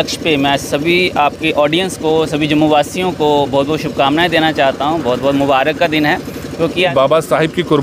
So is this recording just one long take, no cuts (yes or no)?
no